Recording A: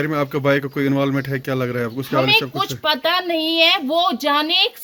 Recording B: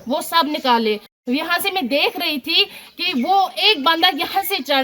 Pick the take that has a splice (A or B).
B